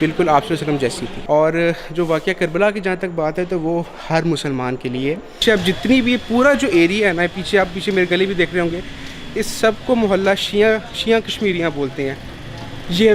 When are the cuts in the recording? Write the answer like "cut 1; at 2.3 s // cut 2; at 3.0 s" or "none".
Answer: cut 1; at 1.1 s // cut 2; at 5.4 s

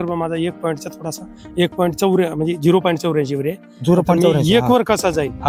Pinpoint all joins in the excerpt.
none

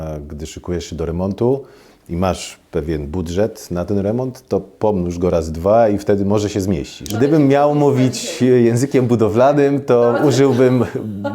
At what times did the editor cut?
cut 1; at 7.1 s

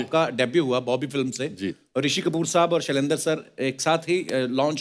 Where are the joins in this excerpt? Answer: none

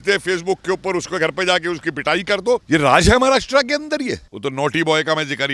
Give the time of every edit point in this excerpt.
cut 1; at 2.6 s // cut 2; at 4.3 s

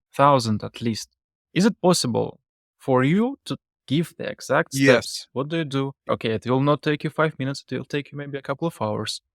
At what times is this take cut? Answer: cut 1; at 6.1 s

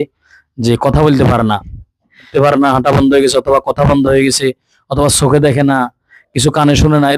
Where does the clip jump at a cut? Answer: cut 1; at 2.3 s

